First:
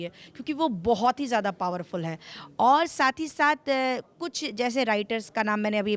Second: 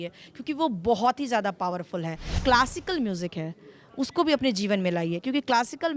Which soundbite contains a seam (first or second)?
second